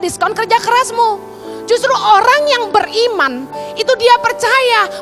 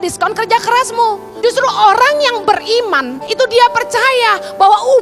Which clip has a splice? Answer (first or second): second